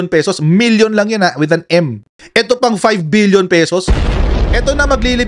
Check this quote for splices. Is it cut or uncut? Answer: uncut